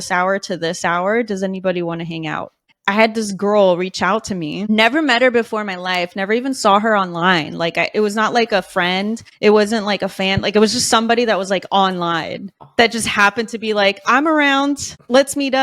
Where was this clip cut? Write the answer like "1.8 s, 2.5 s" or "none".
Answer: none